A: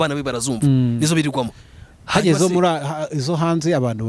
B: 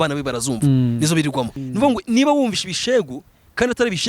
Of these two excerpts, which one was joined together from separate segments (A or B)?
B